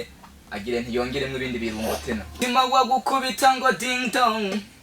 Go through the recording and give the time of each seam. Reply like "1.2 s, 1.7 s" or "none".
2.3 s